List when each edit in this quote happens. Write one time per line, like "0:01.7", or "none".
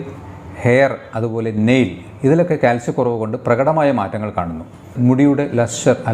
0:04.9